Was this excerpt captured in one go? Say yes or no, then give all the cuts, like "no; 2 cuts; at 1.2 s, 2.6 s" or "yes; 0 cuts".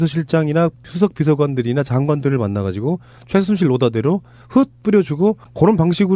yes; 0 cuts